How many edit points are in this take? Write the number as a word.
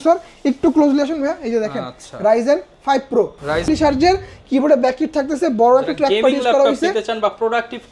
one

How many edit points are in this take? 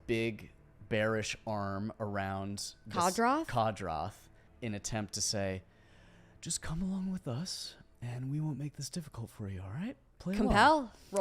one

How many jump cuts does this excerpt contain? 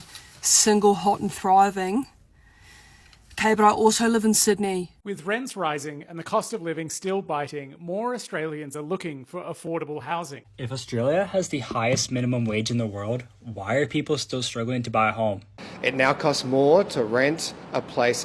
three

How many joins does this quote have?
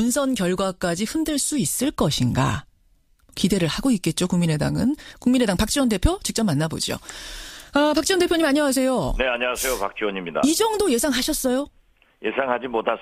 one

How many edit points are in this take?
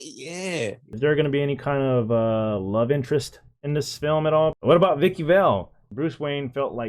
three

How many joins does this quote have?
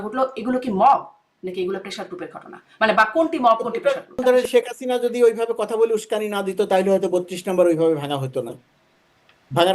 one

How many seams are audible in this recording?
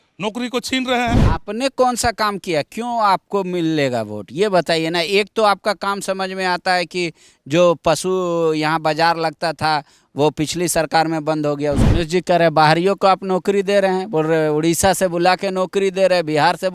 two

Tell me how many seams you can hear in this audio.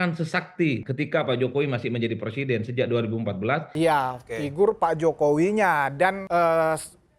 three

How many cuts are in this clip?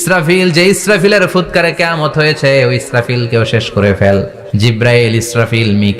one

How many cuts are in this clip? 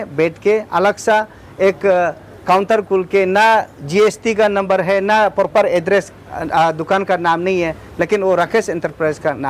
zero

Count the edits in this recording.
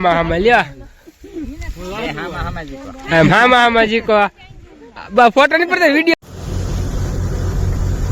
one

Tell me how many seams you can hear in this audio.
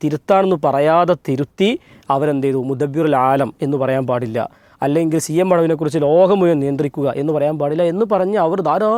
zero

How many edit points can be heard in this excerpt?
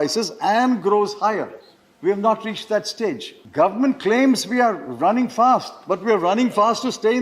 one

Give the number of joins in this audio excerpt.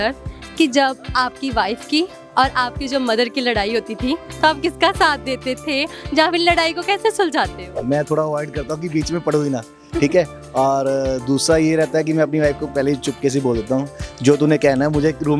zero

